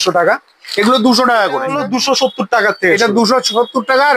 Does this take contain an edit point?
yes; 1 cut; at 1.8 s

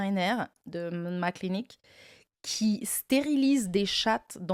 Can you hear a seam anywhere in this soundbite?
no; 0 cuts

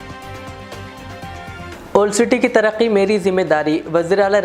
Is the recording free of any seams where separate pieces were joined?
no; 1 cut; at 1.7 s

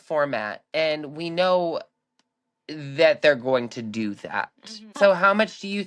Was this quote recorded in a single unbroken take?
no; 1 cut; at 4.9 s

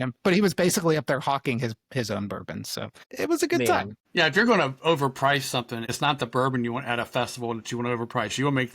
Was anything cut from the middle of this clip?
yes; 3 cuts; at 3.0 s, 4.0 s, 5.9 s

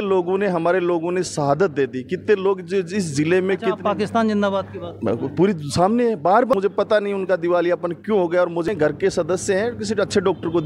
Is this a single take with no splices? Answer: no; 2 cuts; at 6.5 s, 8.7 s

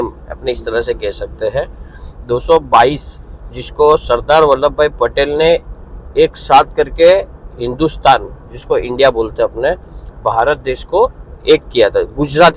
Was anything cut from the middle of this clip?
no; 0 cuts

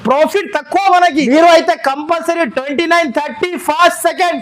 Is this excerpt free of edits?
no; 1 cut; at 1.3 s

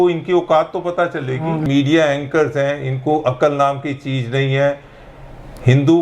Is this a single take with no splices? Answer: no; 1 cut; at 1.6 s

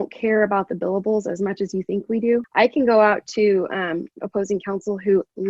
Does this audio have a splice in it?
yes; 1 cut; at 2.5 s

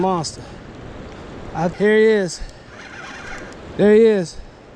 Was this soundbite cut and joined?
yes; 1 cut; at 1.7 s

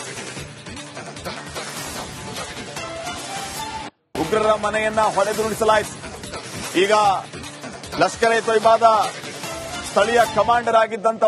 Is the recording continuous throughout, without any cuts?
no; 1 cut; at 1.3 s

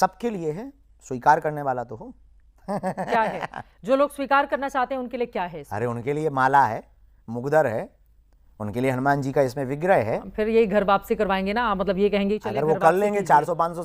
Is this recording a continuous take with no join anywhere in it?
yes; 0 cuts

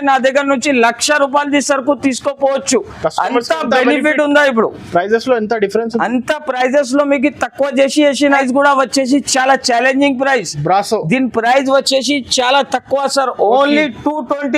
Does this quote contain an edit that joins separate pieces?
yes; 1 cut; at 8.4 s

